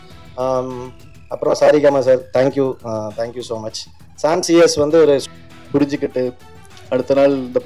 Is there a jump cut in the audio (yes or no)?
yes